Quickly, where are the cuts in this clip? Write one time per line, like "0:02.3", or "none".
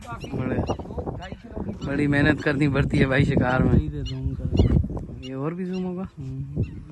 none